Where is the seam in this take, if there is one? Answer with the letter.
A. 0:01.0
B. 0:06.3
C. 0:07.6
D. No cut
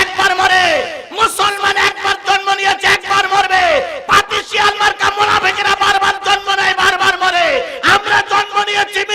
D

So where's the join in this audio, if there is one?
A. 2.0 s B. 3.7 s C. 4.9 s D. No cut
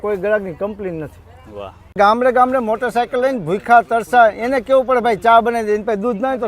A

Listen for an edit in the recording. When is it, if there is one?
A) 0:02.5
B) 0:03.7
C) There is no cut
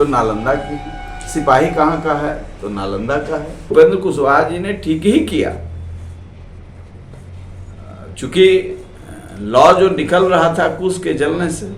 B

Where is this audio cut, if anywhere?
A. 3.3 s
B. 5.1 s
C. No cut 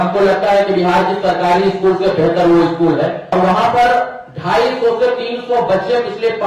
A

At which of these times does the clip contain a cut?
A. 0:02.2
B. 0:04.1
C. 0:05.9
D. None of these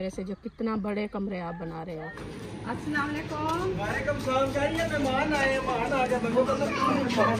A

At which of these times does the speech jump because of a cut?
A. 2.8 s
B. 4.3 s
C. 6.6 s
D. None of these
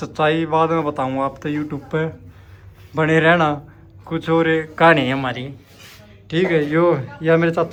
D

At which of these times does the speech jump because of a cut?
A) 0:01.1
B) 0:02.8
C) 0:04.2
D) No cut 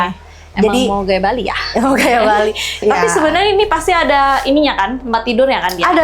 B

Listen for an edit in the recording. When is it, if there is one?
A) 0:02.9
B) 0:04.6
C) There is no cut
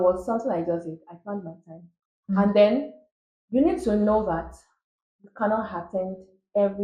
C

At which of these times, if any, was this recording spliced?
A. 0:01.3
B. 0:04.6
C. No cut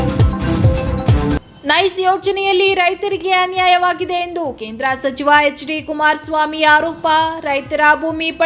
C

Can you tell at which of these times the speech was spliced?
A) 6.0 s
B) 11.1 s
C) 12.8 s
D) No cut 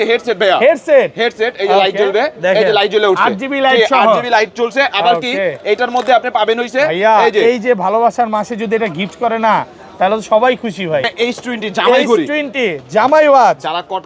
B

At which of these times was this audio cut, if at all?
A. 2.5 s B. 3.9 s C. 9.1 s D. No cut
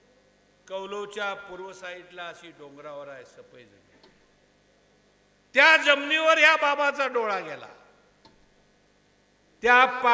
C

